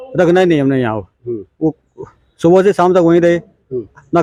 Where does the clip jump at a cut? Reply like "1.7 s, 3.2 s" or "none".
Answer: none